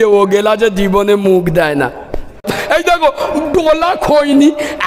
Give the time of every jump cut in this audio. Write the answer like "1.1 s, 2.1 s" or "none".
2.5 s